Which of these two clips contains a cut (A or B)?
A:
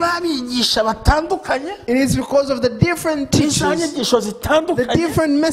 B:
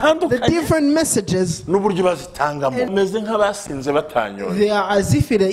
B